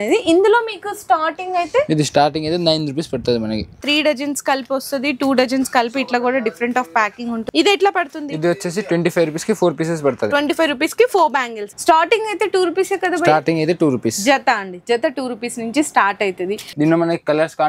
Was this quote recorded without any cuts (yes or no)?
no